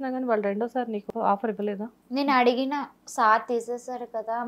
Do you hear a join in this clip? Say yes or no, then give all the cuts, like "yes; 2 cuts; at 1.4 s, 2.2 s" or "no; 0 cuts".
yes; 1 cut; at 1.1 s